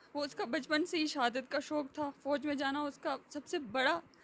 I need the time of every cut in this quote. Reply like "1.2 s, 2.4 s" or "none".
none